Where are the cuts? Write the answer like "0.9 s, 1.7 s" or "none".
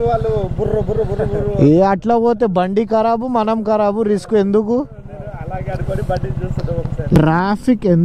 7.1 s